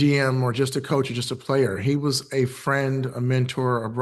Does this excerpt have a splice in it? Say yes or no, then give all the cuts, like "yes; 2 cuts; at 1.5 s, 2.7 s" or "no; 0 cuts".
no; 0 cuts